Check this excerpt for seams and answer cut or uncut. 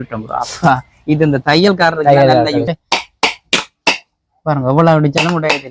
cut